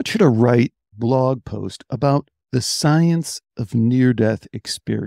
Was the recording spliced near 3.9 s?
no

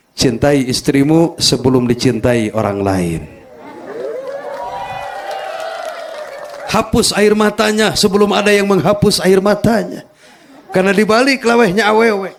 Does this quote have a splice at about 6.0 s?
no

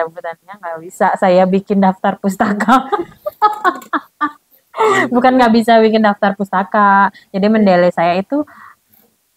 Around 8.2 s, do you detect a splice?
no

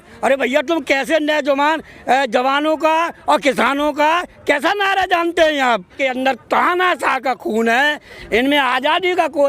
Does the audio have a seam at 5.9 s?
yes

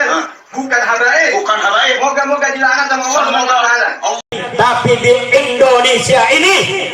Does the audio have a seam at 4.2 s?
yes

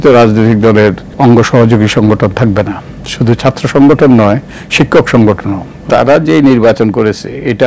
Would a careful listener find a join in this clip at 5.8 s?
yes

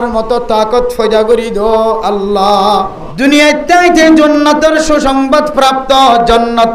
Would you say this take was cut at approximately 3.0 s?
yes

